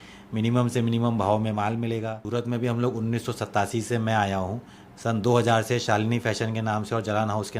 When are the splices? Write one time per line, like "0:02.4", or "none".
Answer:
0:02.2